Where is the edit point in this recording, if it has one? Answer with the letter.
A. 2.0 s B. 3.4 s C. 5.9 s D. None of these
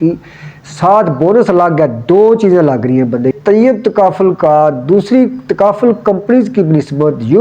B